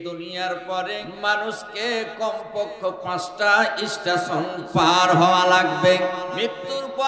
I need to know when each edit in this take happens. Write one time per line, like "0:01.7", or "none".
0:01.1
0:06.3